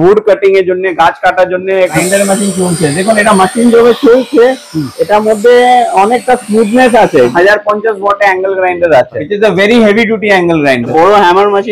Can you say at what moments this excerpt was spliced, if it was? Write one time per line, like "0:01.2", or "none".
0:02.0
0:07.3
0:09.2
0:10.9